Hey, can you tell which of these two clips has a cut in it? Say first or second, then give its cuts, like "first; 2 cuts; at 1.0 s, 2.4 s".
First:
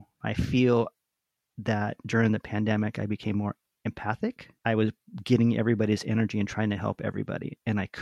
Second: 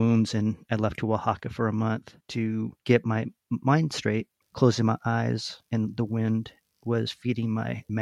second; 2 cuts; at 2.4 s, 4.4 s